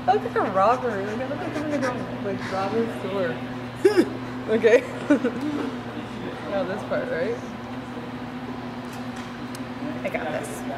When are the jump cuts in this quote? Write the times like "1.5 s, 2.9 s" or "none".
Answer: 3.6 s